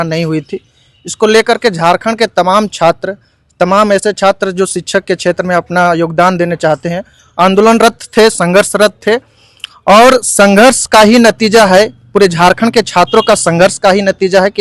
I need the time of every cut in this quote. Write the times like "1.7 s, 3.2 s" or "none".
none